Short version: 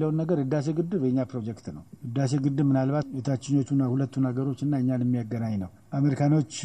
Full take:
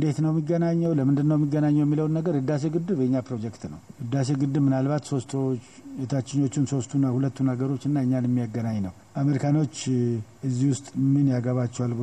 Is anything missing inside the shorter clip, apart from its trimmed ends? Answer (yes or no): yes